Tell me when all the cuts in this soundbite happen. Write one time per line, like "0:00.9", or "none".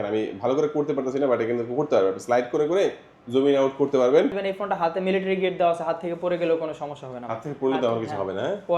0:04.4